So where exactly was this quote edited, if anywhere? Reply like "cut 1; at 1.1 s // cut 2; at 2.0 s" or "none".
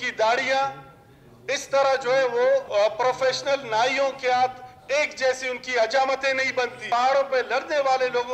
cut 1; at 2.7 s // cut 2; at 6.9 s